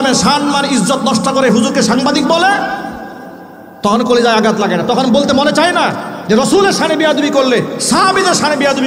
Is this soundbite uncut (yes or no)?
yes